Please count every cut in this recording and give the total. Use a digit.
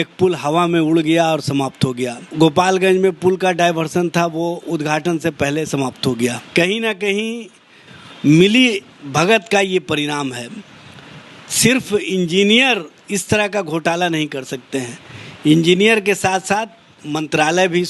2